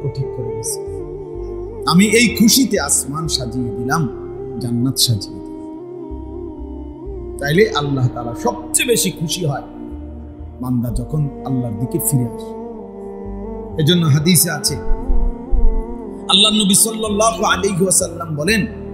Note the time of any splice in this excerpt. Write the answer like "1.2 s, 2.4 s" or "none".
none